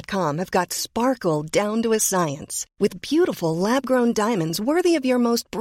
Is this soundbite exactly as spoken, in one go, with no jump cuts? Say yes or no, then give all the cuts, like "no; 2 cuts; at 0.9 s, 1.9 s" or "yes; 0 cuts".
yes; 0 cuts